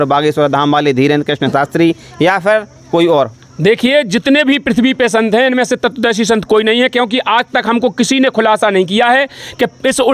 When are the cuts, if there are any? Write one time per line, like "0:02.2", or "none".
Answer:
none